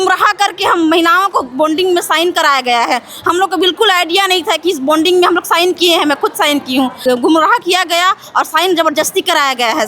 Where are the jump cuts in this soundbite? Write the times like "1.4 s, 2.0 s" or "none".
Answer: 7.0 s